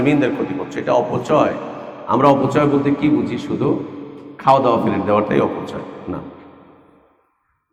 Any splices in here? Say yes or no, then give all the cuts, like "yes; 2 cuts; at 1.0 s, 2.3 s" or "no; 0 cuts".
no; 0 cuts